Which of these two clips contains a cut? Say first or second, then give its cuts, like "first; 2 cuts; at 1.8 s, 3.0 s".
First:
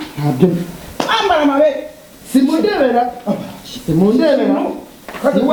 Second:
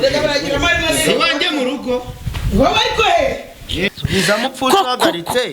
second; 1 cut; at 3.9 s